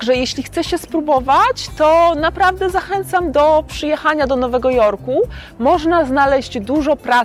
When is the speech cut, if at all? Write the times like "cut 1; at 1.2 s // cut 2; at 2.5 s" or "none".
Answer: none